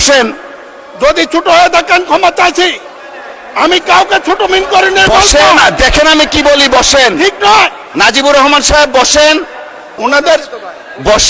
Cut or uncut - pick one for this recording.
uncut